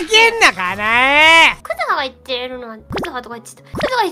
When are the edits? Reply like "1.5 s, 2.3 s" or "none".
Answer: 1.6 s, 3.1 s